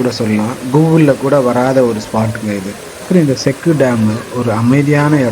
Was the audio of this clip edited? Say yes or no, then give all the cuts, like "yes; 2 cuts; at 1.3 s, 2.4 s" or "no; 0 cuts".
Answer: no; 0 cuts